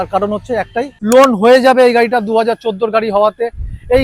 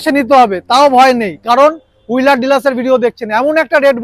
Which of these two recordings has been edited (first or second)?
first